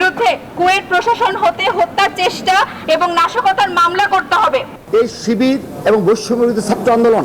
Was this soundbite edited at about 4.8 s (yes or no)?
yes